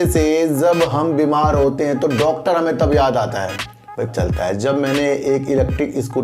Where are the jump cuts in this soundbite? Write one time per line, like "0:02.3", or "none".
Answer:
0:04.1